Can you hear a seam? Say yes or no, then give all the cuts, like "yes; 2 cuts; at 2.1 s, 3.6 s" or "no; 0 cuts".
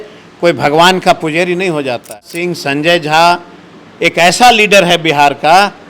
yes; 1 cut; at 2.3 s